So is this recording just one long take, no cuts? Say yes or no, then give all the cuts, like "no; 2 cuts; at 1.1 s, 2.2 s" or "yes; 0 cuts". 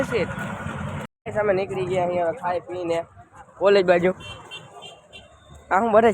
no; 1 cut; at 1.1 s